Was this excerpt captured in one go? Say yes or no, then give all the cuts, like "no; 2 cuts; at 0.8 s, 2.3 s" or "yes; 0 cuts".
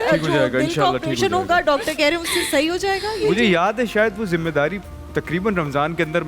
no; 1 cut; at 3.3 s